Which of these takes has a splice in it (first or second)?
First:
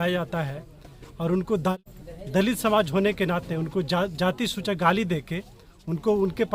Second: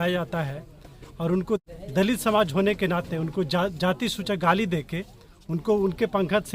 second